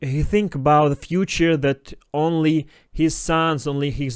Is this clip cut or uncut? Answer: uncut